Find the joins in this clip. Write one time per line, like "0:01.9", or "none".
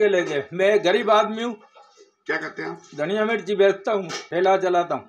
0:04.2